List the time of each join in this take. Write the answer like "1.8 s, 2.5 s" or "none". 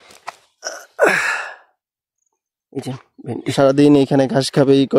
3.8 s